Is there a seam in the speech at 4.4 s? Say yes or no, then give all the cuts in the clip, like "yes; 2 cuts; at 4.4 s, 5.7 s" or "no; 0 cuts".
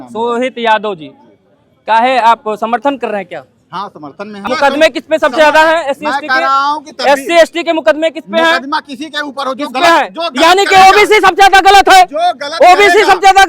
yes; 1 cut; at 4.4 s